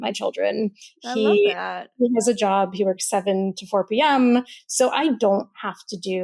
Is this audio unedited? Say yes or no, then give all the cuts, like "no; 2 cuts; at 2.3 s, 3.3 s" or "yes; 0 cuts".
no; 1 cut; at 4.6 s